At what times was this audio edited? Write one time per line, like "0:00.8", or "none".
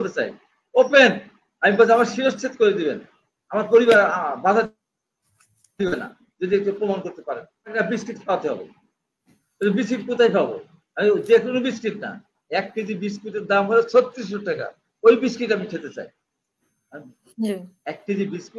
0:07.8